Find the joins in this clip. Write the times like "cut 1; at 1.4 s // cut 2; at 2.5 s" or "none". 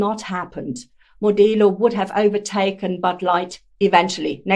none